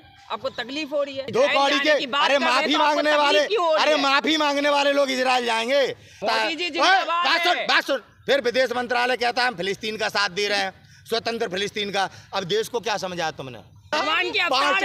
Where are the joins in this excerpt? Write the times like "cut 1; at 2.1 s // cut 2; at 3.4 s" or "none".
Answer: cut 1; at 1.2 s // cut 2; at 6.2 s // cut 3; at 13.9 s